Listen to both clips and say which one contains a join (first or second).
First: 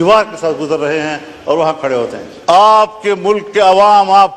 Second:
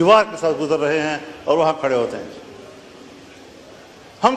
first